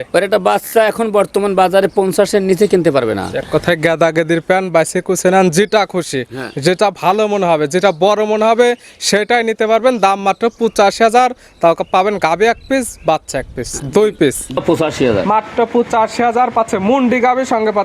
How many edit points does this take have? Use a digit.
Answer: 1